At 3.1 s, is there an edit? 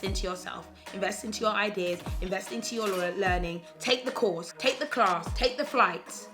no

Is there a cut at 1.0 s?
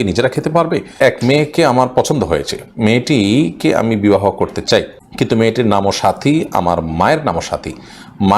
yes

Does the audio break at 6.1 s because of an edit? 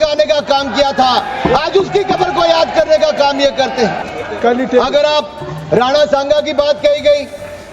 no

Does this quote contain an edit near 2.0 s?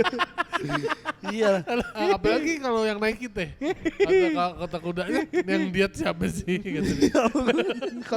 yes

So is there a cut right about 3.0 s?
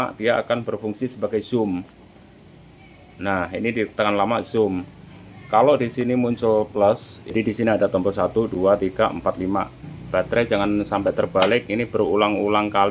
no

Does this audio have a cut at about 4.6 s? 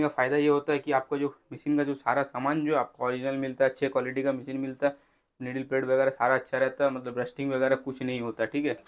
no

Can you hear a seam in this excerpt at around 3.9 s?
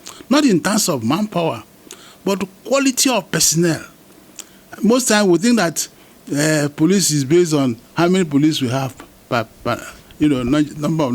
no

